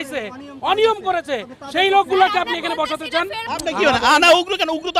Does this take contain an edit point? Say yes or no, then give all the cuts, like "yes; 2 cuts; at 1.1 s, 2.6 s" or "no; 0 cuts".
yes; 1 cut; at 3.4 s